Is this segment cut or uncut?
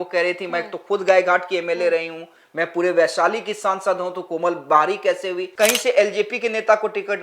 cut